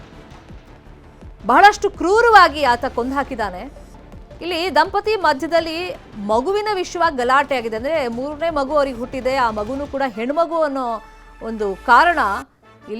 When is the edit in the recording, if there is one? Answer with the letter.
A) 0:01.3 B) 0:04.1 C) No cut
A